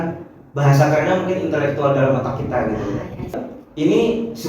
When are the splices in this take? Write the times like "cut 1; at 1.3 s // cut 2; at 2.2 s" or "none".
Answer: cut 1; at 3.5 s